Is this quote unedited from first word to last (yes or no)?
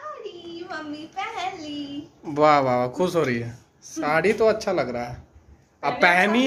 yes